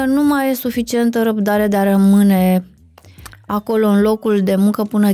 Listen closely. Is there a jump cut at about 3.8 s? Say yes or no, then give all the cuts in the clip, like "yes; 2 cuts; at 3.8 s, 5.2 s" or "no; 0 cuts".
no; 0 cuts